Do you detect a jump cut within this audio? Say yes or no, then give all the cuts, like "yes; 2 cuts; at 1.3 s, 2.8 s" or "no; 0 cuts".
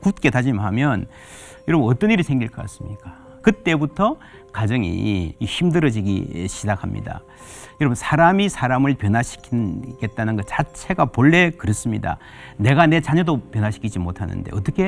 yes; 2 cuts; at 3.2 s, 5.4 s